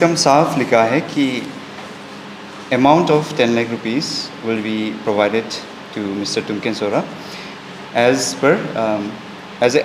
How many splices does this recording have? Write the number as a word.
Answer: zero